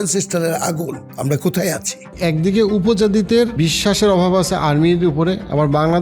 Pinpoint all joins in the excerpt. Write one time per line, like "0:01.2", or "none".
0:01.0
0:02.1
0:03.5